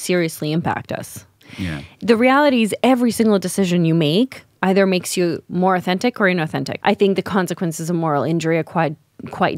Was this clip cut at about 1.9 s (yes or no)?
no